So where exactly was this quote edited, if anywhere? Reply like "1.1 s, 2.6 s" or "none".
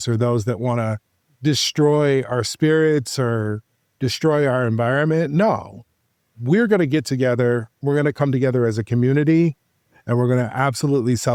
none